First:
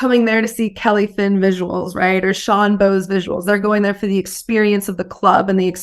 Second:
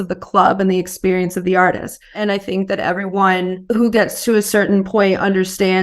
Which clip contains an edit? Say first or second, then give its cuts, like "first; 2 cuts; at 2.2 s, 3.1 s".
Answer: second; 2 cuts; at 2.2 s, 3.6 s